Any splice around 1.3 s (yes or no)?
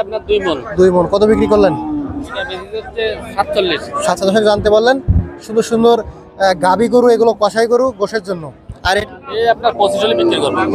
no